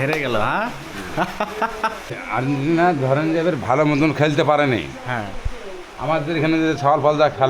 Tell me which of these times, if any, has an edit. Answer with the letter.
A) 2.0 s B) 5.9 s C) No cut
A